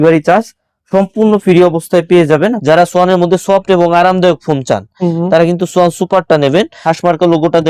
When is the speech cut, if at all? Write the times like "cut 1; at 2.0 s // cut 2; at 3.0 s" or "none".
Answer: cut 1; at 2.6 s // cut 2; at 6.7 s